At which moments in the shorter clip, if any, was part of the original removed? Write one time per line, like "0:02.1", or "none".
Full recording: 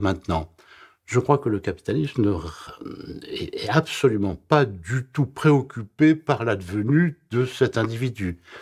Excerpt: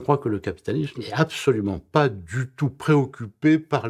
0:00.9